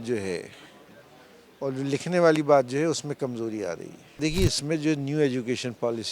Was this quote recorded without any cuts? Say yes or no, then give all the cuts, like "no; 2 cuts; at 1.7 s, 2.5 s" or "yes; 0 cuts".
no; 1 cut; at 4.2 s